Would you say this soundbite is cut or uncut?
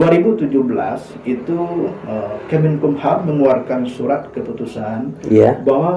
uncut